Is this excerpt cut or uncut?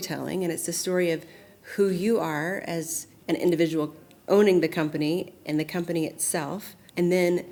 uncut